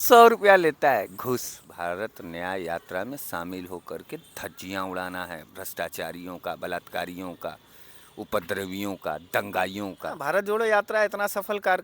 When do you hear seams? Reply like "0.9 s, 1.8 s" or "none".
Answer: 1.6 s, 10.2 s